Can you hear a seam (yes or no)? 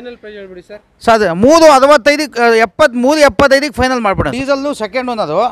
yes